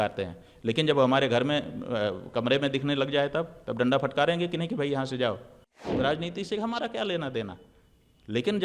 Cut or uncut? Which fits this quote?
cut